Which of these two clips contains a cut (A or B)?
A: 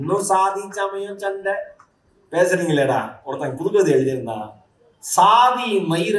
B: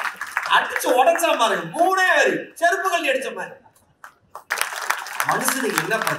B